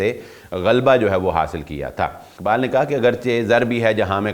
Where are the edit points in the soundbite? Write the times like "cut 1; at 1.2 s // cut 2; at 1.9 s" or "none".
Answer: cut 1; at 2.3 s